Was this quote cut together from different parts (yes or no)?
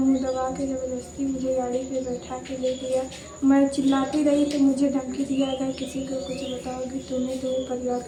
no